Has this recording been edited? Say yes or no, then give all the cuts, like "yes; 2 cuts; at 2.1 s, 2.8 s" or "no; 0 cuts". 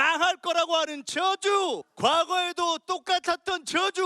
yes; 1 cut; at 1.9 s